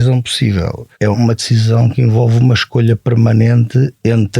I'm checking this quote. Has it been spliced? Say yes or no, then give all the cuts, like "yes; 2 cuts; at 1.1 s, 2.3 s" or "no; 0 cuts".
yes; 1 cut; at 1.0 s